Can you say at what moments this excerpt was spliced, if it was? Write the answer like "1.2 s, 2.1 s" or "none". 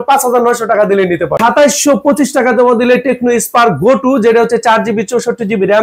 1.4 s